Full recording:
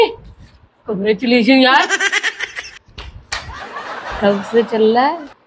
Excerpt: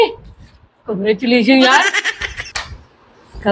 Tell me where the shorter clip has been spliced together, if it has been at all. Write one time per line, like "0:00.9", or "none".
0:01.9